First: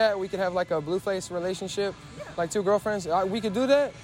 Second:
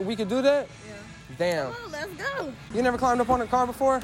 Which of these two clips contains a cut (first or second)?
second